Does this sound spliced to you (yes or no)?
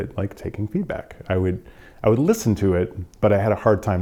no